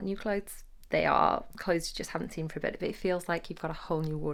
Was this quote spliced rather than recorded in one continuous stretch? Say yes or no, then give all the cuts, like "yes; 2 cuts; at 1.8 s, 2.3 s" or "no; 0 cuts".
no; 0 cuts